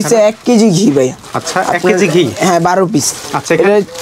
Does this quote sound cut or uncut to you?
uncut